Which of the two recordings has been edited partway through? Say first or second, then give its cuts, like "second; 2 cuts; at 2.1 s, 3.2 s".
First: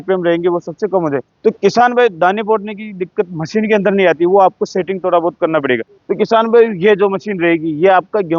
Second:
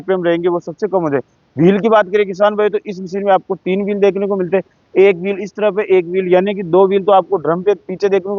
first; 2 cuts; at 1.3 s, 6.0 s